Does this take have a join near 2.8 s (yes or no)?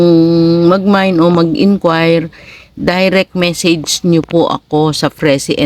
no